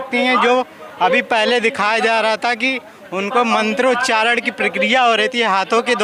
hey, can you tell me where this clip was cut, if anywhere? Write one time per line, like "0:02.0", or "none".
none